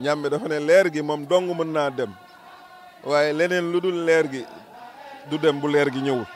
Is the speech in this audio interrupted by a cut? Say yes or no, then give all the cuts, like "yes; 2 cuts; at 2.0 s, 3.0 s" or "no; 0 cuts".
no; 0 cuts